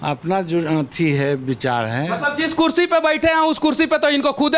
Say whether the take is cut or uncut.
uncut